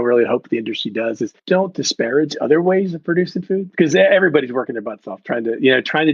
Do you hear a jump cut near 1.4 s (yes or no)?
yes